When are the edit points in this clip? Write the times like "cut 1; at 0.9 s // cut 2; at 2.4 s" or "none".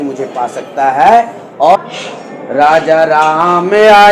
cut 1; at 1.8 s